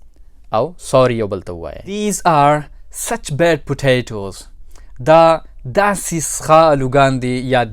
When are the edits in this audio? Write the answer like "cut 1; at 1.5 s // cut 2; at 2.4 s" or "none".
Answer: cut 1; at 2.0 s